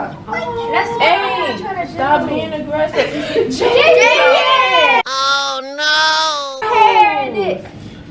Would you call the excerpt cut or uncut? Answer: uncut